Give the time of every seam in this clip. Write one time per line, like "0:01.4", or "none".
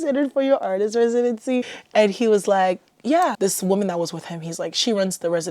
0:01.8
0:03.4

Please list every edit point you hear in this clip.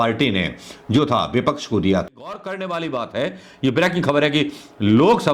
0:02.1

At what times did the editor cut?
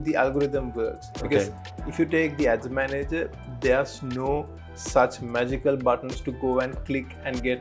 none

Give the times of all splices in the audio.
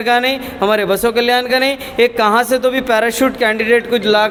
none

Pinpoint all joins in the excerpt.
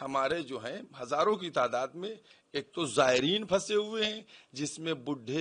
none

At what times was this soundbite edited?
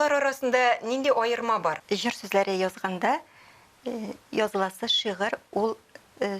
0:01.8

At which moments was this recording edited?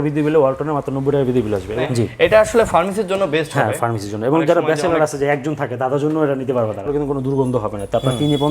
0:01.8
0:06.9

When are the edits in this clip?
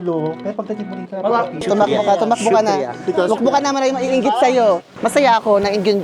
0:01.6
0:04.9

